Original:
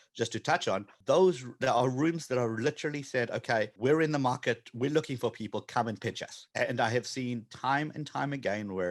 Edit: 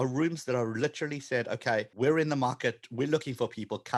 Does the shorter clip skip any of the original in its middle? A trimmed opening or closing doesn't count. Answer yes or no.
no